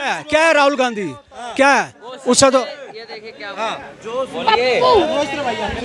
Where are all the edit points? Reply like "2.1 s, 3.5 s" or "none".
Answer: none